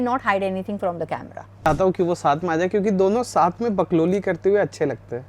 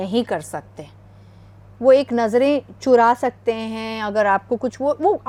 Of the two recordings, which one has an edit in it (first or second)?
first